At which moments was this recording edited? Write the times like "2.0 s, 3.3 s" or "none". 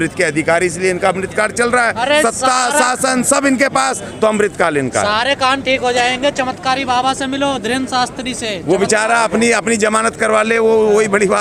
none